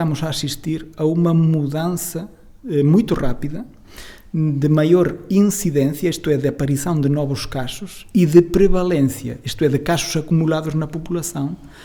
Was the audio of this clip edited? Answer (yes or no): no